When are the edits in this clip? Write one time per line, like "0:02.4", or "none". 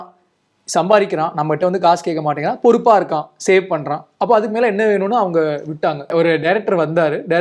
0:06.1